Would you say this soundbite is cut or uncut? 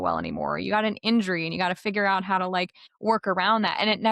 cut